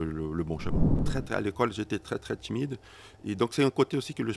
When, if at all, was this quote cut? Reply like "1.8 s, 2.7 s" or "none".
0.9 s